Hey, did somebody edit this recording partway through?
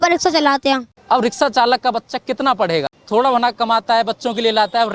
yes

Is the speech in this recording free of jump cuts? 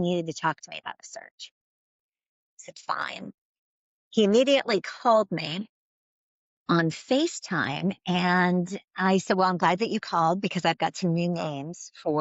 yes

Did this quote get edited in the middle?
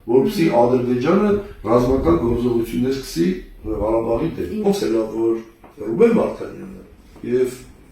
yes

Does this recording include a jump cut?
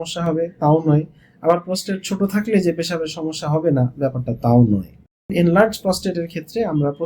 yes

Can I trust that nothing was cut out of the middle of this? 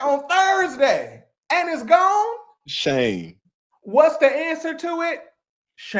yes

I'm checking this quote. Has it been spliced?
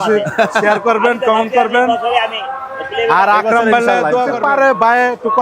yes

